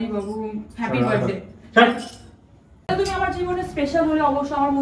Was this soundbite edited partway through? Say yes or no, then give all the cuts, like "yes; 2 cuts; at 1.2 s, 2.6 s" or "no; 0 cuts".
yes; 1 cut; at 2.9 s